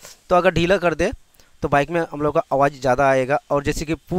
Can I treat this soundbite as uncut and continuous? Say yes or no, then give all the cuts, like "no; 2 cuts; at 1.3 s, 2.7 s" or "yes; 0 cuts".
yes; 0 cuts